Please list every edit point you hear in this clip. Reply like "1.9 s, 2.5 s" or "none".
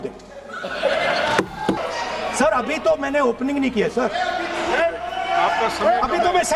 1.8 s